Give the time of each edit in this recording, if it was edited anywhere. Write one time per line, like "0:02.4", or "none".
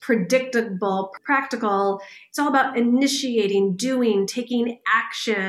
0:01.2